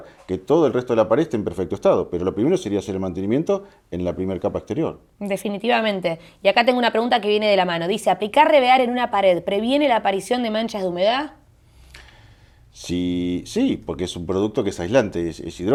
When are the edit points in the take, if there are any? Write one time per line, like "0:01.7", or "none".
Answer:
none